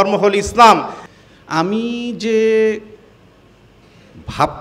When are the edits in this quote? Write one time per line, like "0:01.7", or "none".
0:01.0